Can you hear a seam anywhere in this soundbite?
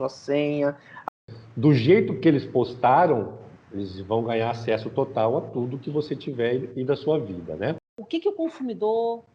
yes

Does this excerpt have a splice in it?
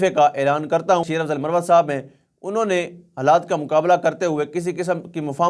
yes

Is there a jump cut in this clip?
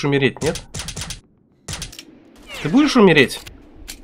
yes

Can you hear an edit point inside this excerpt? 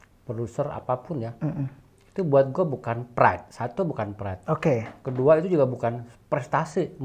no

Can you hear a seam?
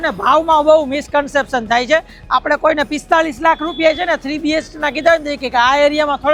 no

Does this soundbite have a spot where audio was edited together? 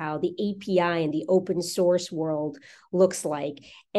no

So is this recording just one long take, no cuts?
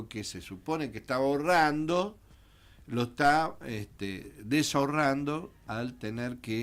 yes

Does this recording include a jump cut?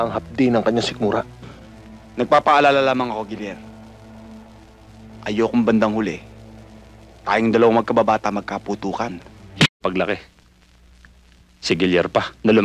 yes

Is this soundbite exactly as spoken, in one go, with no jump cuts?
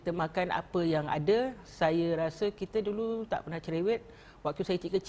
yes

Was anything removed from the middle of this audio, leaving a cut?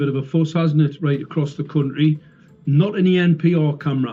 no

